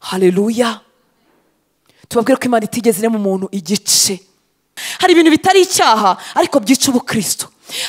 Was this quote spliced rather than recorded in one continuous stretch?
yes; 1 cut; at 4.8 s

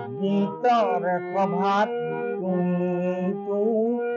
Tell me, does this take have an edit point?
no; 0 cuts

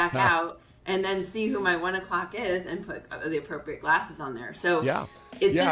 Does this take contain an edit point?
no; 0 cuts

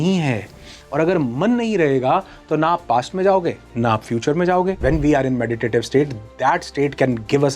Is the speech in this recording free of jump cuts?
no; 1 cut; at 4.8 s

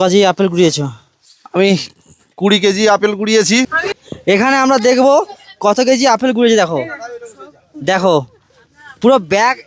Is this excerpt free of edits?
yes; 0 cuts

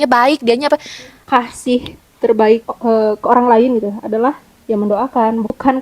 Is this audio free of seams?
no; 1 cut; at 1.2 s

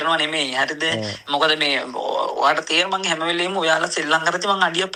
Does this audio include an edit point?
no; 0 cuts

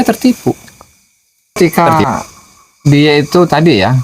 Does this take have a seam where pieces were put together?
yes; 1 cut; at 1.6 s

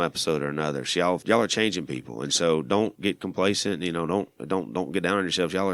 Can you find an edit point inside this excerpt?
yes; 2 cuts; at 1.2 s, 3.0 s

